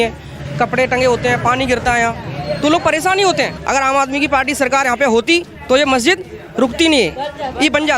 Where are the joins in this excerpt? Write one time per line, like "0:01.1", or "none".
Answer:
0:03.5